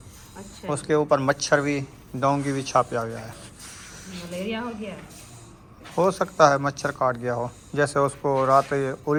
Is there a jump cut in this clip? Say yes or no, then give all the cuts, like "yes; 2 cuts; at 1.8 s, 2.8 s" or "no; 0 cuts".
no; 0 cuts